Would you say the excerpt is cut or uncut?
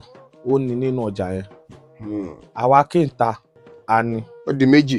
uncut